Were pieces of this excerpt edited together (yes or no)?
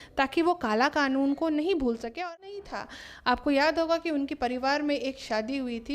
yes